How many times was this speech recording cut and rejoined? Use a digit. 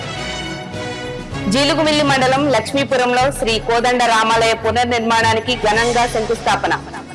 1